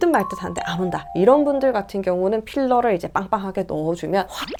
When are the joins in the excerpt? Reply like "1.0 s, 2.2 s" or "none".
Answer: none